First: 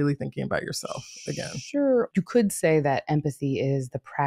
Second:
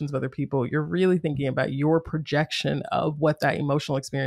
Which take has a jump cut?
first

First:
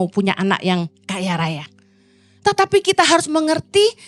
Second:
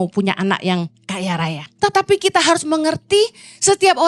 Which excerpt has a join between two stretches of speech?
second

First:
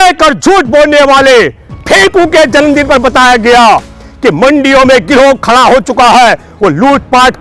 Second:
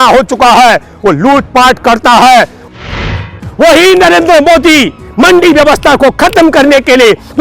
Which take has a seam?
second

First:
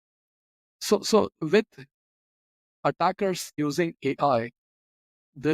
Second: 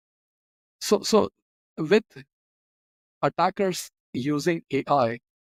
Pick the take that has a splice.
first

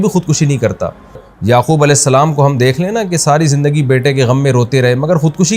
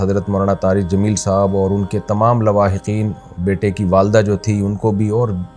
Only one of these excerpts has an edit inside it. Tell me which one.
first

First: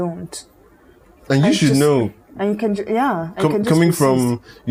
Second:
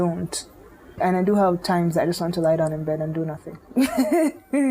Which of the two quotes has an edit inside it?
second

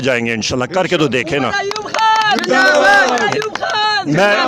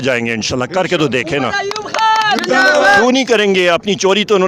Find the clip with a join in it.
second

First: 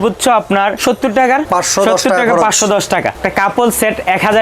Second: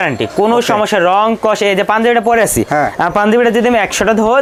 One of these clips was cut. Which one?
first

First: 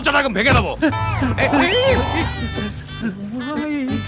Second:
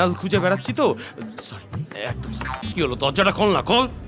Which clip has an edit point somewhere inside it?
second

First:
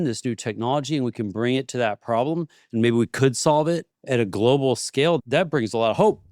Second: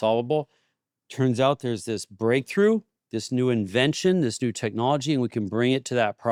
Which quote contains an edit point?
first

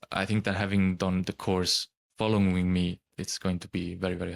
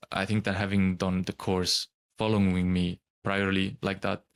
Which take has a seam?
first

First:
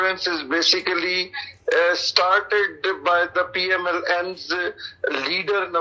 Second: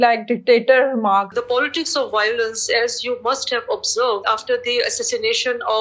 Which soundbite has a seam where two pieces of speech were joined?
second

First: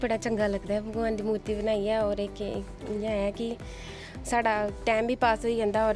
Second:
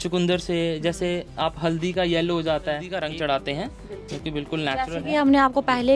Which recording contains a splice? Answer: second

